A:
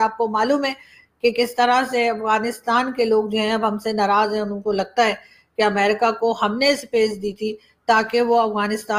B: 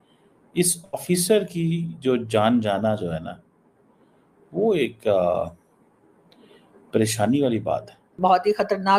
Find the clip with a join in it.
B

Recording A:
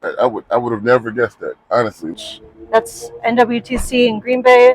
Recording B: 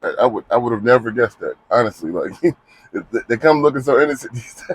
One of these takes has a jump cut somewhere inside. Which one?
A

